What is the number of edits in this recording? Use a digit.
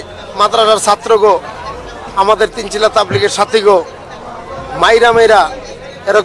0